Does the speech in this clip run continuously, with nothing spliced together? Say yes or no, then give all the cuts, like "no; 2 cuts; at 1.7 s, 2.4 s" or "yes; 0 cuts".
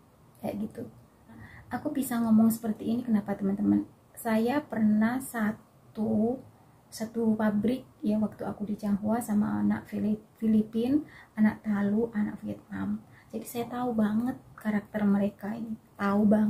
yes; 0 cuts